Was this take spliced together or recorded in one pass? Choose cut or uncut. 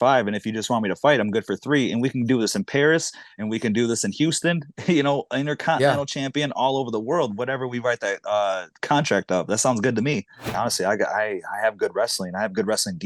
cut